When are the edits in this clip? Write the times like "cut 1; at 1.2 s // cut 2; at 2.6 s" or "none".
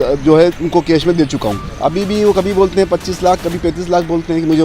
cut 1; at 1.7 s